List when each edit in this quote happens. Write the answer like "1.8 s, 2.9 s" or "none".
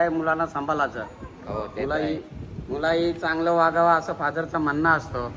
none